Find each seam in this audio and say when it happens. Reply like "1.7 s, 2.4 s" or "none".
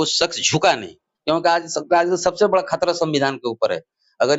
1.1 s